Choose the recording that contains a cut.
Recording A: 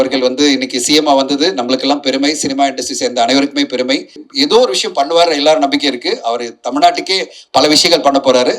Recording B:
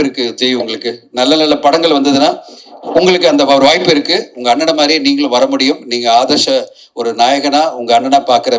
A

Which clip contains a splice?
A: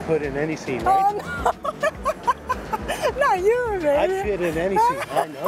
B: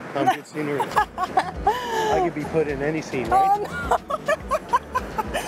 B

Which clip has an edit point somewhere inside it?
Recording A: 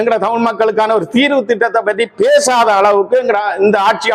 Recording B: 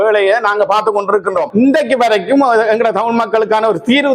B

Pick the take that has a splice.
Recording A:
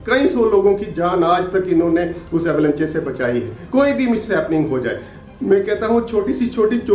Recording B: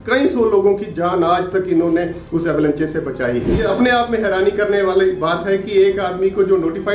B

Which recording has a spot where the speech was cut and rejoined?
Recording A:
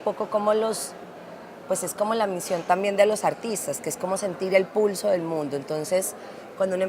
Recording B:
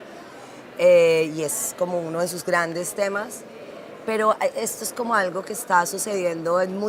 A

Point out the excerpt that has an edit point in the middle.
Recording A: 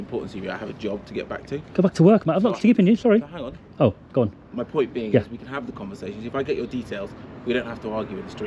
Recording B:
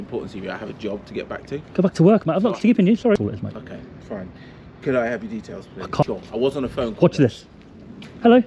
B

